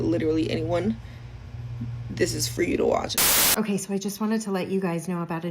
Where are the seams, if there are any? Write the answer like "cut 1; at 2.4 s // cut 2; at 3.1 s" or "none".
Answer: cut 1; at 3.2 s